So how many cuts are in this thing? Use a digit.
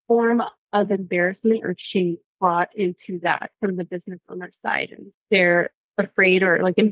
1